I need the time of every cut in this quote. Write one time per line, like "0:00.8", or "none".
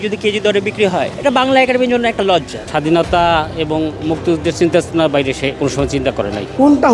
0:01.1
0:02.6
0:05.9